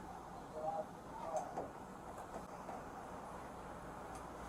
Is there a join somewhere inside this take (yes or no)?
yes